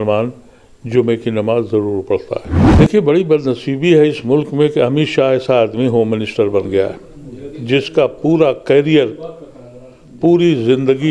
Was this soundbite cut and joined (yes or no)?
yes